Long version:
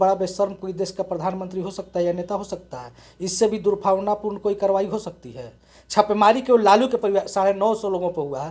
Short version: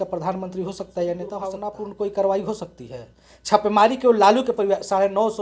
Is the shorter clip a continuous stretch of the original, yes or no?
no